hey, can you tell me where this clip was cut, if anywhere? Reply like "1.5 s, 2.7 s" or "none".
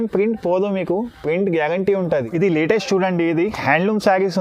2.1 s